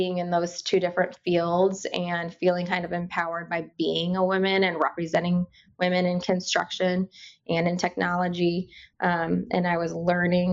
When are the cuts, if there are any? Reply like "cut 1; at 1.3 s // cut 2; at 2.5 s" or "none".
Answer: none

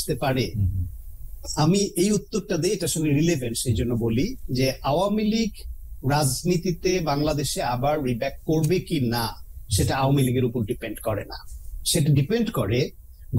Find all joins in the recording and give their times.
none

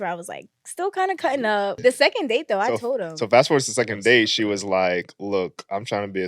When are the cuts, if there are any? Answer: cut 1; at 1.7 s

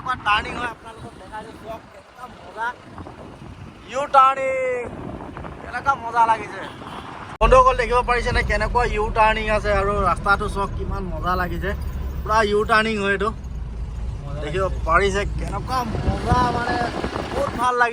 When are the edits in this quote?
none

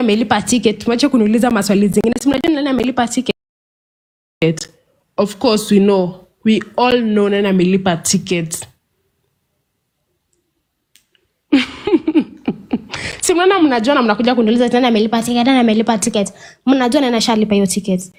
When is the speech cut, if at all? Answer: none

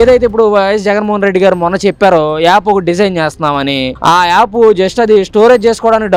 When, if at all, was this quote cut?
none

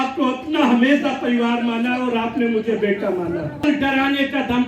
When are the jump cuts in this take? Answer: cut 1; at 3.6 s

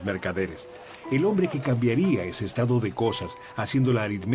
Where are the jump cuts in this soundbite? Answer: none

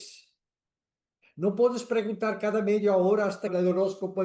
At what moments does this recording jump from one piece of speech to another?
none

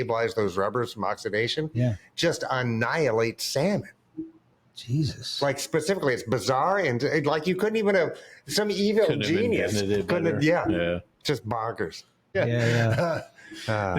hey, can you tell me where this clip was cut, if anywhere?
cut 1; at 12.4 s

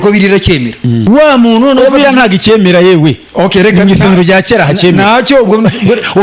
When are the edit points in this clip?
cut 1; at 1.1 s

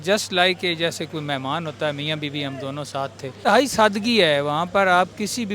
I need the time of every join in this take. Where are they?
cut 1; at 3.4 s

